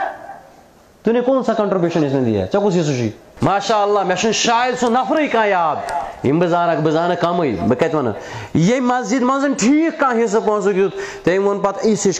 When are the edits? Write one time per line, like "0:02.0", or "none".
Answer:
0:03.3

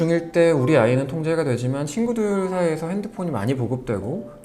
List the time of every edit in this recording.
none

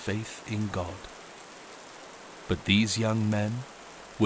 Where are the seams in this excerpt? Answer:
0:01.0
0:02.5

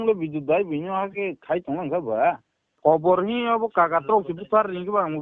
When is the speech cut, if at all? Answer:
0:02.7

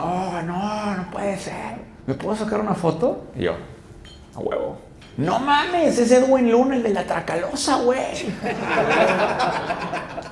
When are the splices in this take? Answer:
0:01.9
0:04.9

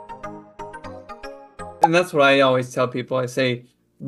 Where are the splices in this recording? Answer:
0:01.6

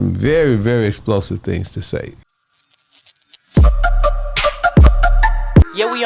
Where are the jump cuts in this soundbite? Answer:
0:02.2

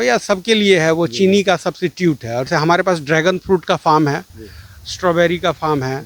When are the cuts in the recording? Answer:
0:02.5

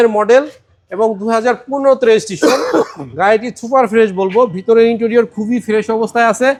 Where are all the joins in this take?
none

